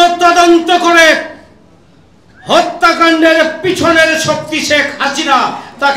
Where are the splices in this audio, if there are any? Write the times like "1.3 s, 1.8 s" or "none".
none